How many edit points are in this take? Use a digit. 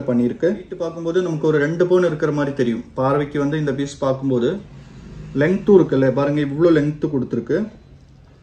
1